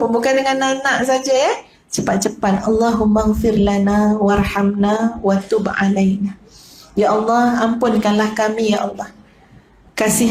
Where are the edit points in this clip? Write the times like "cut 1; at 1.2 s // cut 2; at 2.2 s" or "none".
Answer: none